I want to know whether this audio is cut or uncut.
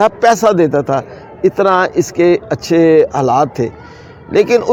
uncut